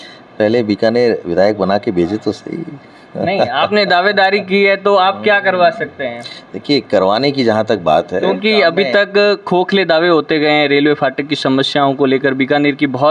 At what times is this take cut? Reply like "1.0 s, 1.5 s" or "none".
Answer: none

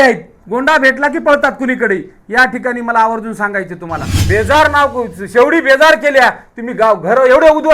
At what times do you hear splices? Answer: 4.2 s

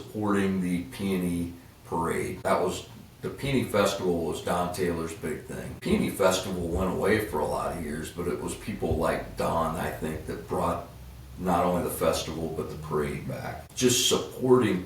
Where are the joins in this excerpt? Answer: 2.3 s, 5.7 s, 13.7 s

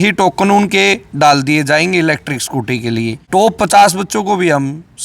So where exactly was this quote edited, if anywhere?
3.2 s

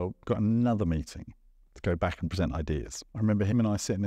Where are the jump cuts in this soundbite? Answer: 3.2 s

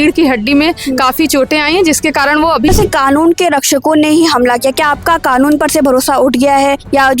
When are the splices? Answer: 2.7 s

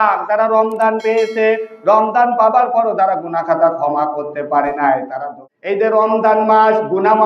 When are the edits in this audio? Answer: 5.8 s

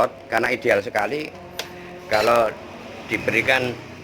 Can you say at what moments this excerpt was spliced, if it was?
2.2 s

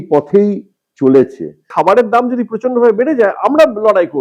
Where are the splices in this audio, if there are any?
1.7 s

